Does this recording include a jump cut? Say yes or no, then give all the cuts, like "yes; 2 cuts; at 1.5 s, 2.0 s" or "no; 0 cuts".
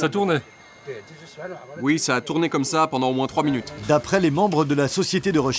yes; 1 cut; at 3.7 s